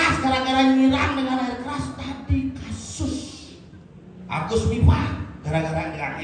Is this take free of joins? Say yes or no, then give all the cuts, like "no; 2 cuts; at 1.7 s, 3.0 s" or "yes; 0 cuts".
yes; 0 cuts